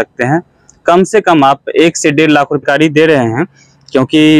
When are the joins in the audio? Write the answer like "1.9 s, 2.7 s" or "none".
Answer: 2.6 s